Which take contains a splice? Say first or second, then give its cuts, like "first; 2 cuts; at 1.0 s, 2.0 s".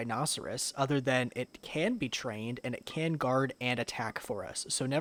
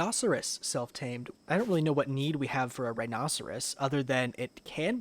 second; 1 cut; at 1.2 s